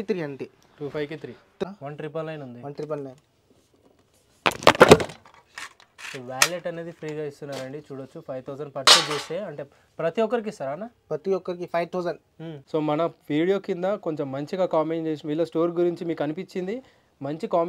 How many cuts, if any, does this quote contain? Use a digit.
2